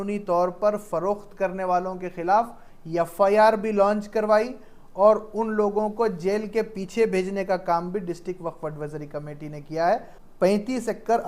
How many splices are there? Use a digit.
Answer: 1